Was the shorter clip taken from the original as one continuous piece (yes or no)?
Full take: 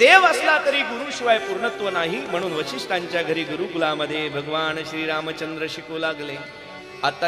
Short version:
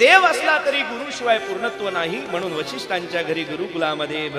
yes